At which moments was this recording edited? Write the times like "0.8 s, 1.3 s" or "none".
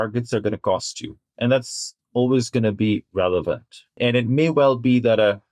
1.3 s, 3.8 s